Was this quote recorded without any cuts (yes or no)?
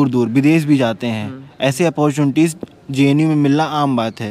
yes